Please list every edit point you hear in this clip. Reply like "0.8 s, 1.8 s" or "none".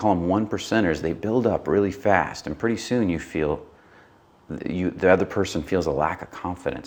none